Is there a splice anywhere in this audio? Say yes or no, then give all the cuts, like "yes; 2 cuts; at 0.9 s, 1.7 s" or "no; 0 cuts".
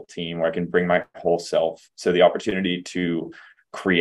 yes; 1 cut; at 1.9 s